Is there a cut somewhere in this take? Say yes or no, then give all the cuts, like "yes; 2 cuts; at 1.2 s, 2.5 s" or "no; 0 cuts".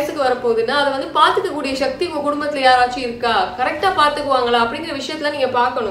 no; 0 cuts